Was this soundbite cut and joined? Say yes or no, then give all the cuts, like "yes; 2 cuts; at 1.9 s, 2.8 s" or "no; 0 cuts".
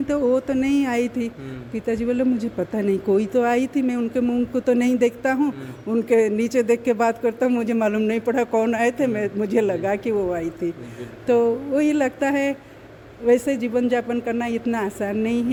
no; 0 cuts